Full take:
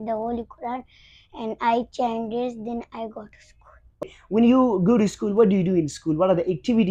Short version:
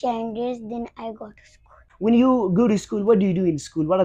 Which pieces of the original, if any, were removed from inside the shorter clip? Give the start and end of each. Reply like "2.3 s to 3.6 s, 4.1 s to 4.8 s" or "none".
3.8 s to 4.2 s